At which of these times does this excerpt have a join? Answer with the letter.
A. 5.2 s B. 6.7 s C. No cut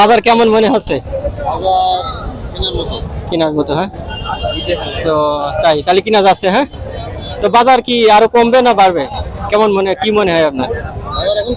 C